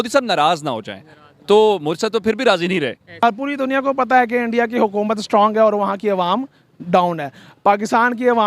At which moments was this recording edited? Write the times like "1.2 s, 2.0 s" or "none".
3.2 s